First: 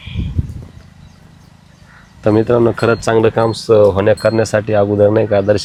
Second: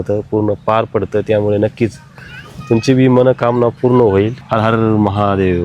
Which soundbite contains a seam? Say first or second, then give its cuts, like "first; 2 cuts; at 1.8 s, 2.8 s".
second; 1 cut; at 4.5 s